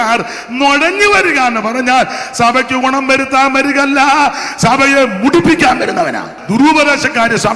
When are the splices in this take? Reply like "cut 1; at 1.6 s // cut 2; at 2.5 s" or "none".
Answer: cut 1; at 6.3 s